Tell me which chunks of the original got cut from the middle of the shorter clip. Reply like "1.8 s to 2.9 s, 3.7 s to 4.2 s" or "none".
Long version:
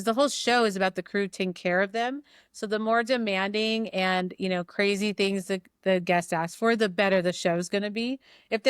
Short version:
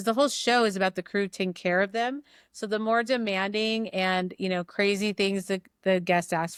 none